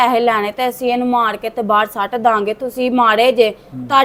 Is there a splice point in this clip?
no; 0 cuts

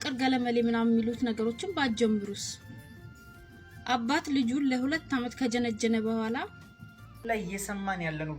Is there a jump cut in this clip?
yes; 1 cut; at 7.2 s

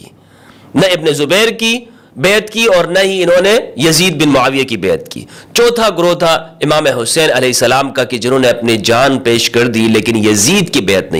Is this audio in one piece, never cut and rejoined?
yes; 0 cuts

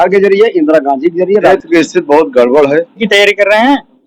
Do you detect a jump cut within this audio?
yes; 2 cuts; at 1.5 s, 3.0 s

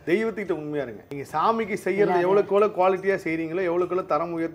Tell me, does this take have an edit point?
yes; 1 cut; at 1.1 s

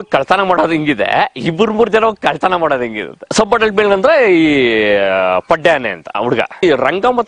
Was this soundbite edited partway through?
yes; 2 cuts; at 3.3 s, 6.2 s

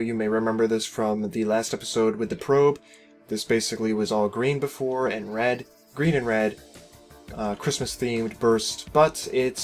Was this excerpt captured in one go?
no; 1 cut; at 2.2 s

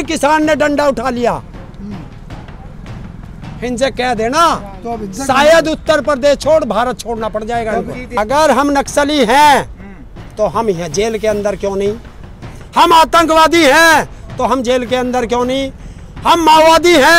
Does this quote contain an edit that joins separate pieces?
yes; 1 cut; at 8.0 s

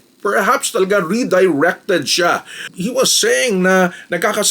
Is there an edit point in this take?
yes; 1 cut; at 2.8 s

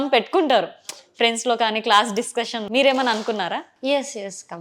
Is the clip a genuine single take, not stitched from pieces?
yes; 0 cuts

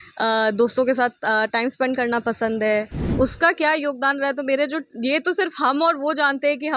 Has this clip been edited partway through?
yes; 1 cut; at 3.0 s

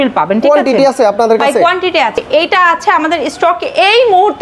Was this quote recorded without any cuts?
yes; 0 cuts

